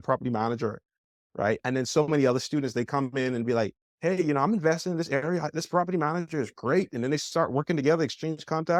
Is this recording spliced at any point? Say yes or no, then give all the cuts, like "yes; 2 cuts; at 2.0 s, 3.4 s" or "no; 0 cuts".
no; 0 cuts